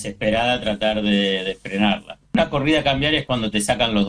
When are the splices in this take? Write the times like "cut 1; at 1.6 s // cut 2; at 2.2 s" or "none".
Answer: cut 1; at 2.3 s